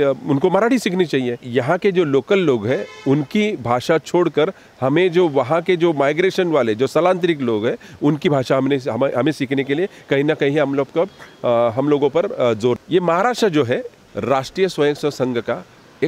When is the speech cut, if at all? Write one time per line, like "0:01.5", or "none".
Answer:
0:01.4
0:12.8
0:14.0